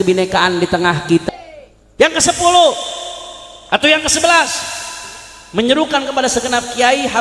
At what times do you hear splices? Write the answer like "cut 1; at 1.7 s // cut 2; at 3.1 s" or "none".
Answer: cut 1; at 1.2 s